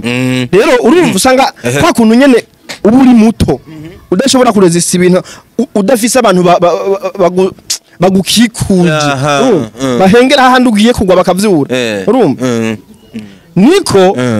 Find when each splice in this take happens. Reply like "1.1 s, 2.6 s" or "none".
none